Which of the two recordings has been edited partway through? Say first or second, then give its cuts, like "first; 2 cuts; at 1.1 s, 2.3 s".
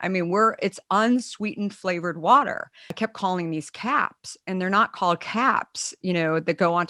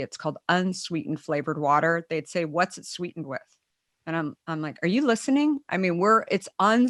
first; 1 cut; at 2.9 s